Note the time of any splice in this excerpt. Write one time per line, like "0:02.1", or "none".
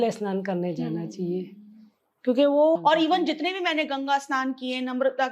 0:02.8